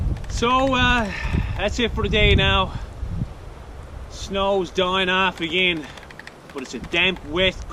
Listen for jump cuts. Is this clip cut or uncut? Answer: uncut